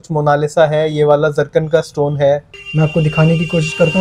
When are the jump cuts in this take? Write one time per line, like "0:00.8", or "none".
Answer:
0:02.6